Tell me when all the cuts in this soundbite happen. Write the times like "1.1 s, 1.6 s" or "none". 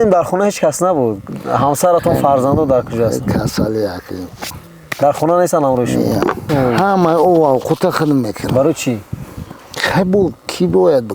6.5 s